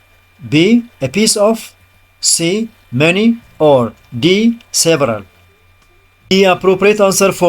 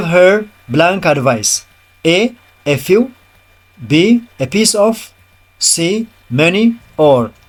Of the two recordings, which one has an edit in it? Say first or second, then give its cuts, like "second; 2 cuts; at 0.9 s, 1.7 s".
first; 1 cut; at 6.3 s